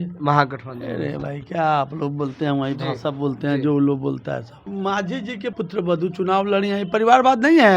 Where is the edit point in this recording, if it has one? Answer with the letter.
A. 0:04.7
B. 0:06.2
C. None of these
A